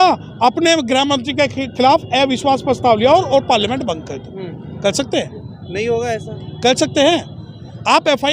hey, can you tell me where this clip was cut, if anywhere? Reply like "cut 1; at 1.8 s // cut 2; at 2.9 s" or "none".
none